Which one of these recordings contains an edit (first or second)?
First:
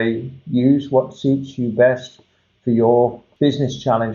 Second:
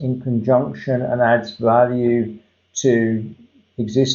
first